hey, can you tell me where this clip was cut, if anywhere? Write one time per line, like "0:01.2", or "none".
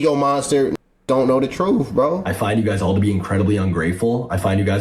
0:02.1